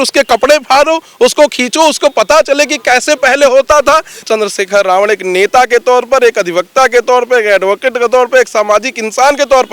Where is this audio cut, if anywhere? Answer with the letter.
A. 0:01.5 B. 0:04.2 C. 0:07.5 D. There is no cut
B